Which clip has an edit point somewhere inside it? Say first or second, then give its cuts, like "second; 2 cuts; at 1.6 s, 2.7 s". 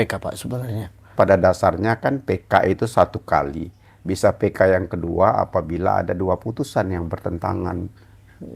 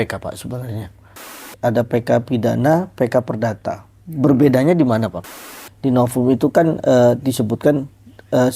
second; 2 cuts; at 1.3 s, 5.2 s